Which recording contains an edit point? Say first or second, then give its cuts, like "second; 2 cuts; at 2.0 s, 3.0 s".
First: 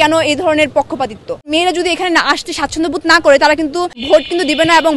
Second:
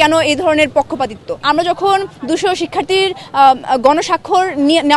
first; 2 cuts; at 1.5 s, 4.0 s